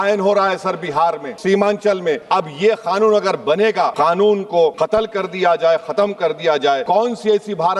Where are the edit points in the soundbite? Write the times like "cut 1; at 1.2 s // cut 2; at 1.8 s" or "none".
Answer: cut 1; at 1.3 s // cut 2; at 2.2 s // cut 3; at 3.9 s // cut 4; at 4.7 s // cut 5; at 6.8 s